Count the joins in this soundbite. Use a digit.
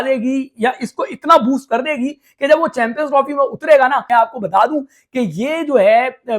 1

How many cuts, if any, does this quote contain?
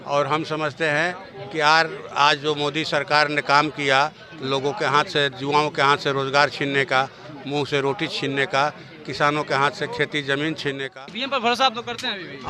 1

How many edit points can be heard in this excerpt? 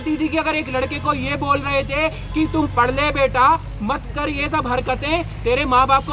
0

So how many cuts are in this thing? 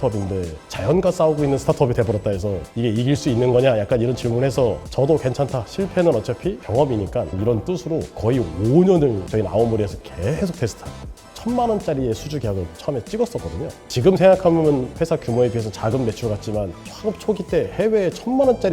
1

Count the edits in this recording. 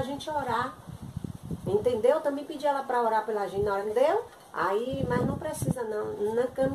1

